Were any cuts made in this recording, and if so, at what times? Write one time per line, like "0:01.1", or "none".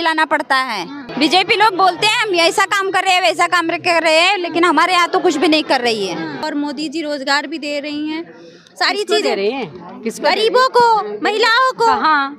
0:01.0
0:06.5

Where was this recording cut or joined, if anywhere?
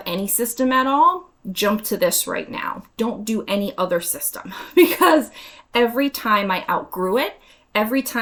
none

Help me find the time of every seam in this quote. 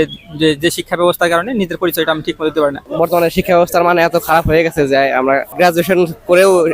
0:02.8
0:05.5

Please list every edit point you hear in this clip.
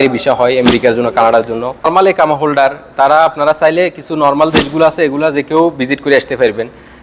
0:01.9

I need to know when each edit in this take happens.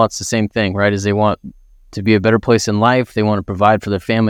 none

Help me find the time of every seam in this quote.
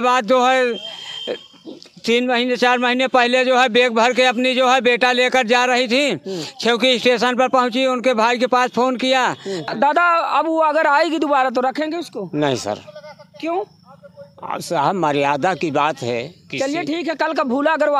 0:09.6

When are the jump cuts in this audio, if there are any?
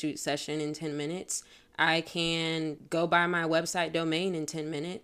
0:02.8

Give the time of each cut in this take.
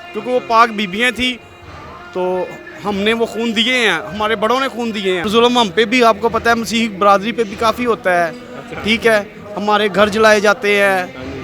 0:05.2

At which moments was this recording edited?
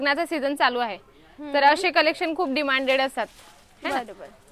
none

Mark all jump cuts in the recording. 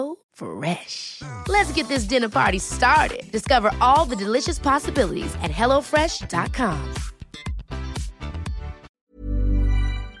0:08.9

